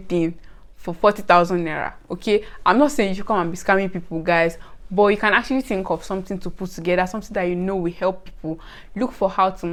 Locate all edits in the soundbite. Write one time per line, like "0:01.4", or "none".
none

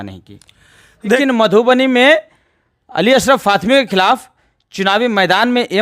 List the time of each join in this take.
0:01.2

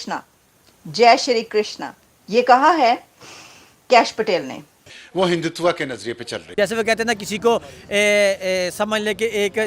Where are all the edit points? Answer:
none

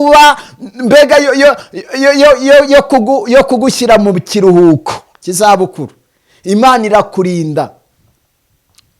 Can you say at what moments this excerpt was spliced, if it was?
none

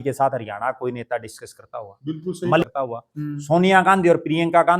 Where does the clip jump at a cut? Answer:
0:02.6

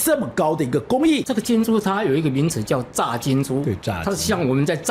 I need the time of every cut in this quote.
0:01.2

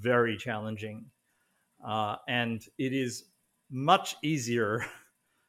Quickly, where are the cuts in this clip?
none

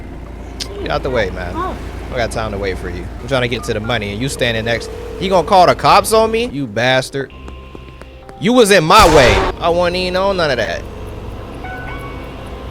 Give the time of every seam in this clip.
0:03.2
0:06.5
0:09.5

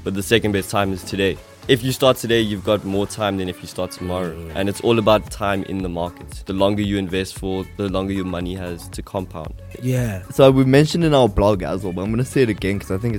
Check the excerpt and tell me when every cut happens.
none

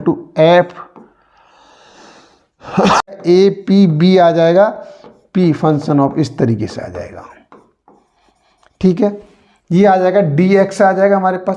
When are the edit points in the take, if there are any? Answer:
0:03.1

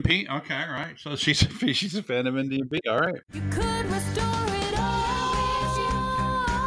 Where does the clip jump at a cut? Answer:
0:03.2

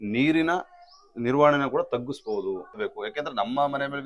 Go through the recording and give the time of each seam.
0:02.8

